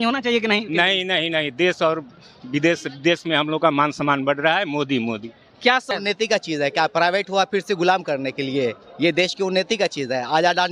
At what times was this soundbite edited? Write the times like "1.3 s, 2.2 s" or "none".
5.9 s